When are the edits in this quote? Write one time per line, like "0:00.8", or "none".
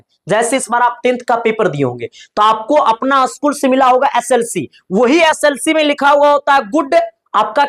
none